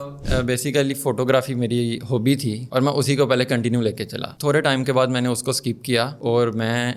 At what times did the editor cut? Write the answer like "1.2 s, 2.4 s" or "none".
none